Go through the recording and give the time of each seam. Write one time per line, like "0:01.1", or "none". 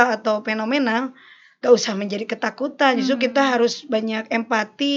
none